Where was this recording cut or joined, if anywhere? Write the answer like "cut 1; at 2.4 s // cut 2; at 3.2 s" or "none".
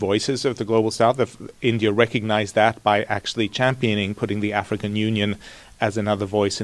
none